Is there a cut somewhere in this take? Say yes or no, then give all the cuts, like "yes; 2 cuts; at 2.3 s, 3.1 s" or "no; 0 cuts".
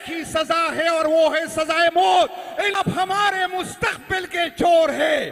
yes; 1 cut; at 2.7 s